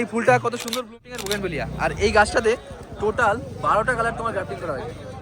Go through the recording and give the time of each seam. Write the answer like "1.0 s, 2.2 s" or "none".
1.0 s